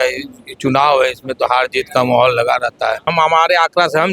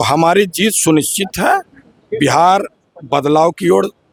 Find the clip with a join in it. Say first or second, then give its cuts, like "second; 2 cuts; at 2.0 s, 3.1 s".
first; 1 cut; at 3.1 s